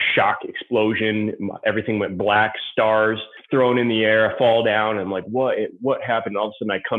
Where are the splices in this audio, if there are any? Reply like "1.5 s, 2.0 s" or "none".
3.3 s